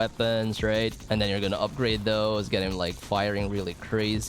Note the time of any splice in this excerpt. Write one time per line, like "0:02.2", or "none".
0:01.0